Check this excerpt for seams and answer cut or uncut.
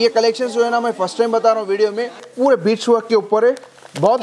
cut